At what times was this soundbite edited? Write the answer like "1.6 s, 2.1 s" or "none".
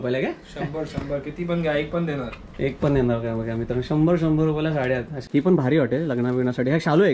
5.2 s